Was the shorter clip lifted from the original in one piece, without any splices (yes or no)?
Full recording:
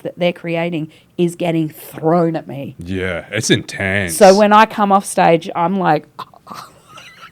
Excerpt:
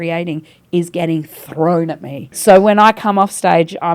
no